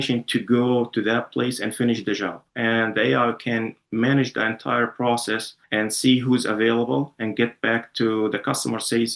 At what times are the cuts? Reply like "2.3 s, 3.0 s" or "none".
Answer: 5.5 s